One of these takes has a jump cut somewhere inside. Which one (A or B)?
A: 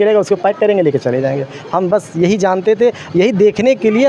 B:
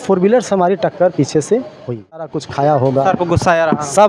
B